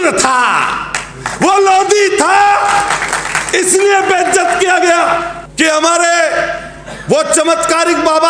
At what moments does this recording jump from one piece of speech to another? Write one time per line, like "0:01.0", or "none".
0:05.4